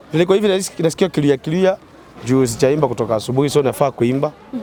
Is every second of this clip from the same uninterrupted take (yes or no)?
yes